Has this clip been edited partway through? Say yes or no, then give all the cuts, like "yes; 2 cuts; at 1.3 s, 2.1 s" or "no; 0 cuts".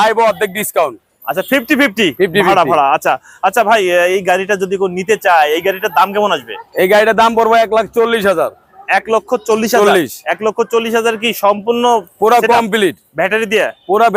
no; 0 cuts